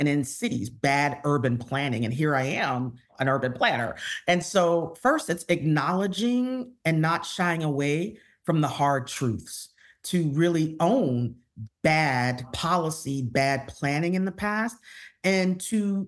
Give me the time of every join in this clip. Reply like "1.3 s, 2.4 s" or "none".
3.1 s, 12.5 s